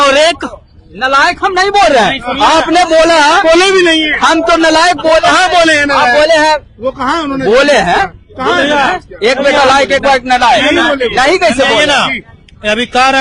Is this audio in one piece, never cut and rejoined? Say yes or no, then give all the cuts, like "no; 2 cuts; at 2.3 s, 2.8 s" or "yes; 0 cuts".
yes; 0 cuts